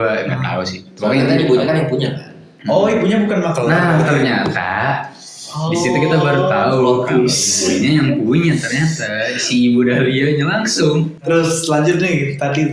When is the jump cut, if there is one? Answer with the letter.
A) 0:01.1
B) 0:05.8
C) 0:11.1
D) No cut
C